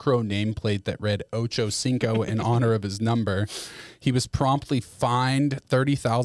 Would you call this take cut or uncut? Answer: uncut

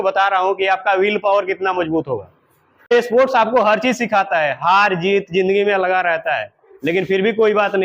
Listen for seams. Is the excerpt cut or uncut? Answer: cut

